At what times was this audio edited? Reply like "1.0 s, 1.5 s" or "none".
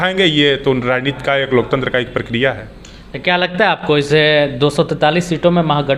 none